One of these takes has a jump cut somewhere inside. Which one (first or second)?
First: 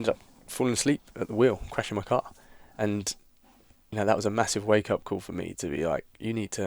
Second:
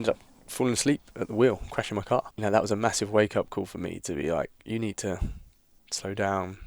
second